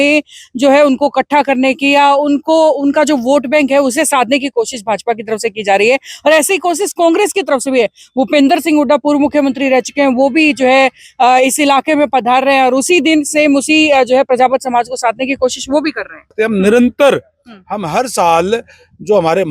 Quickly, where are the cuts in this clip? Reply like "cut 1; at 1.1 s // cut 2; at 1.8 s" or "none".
cut 1; at 16.3 s

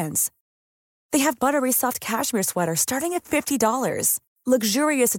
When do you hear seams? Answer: none

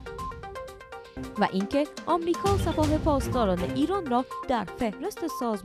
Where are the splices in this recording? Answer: none

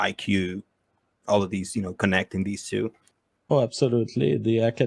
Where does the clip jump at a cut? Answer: cut 1; at 3.0 s

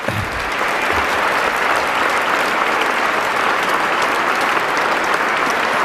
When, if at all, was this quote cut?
none

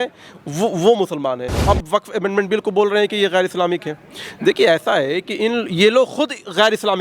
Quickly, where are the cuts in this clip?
cut 1; at 1.6 s

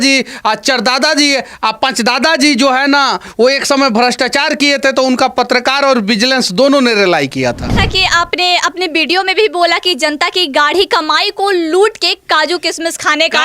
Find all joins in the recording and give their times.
cut 1; at 7.7 s

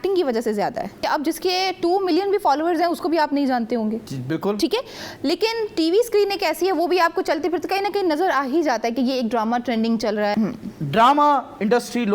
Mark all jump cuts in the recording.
cut 1; at 1.0 s // cut 2; at 10.3 s

